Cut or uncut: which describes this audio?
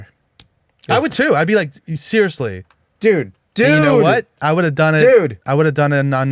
cut